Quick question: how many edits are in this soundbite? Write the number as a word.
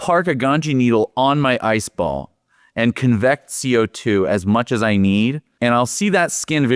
one